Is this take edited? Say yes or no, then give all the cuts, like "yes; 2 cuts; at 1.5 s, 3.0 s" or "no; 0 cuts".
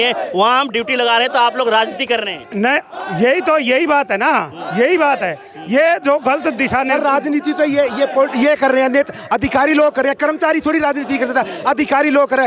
no; 0 cuts